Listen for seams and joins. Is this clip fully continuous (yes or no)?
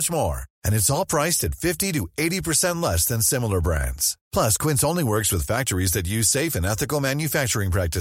yes